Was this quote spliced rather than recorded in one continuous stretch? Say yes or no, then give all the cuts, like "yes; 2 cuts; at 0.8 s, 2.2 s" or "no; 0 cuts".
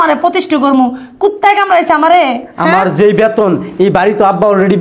no; 0 cuts